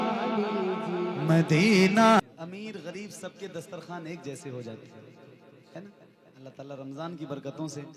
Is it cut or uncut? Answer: cut